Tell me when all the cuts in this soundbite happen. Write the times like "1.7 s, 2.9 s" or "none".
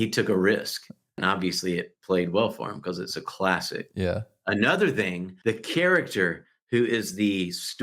1.2 s, 5.3 s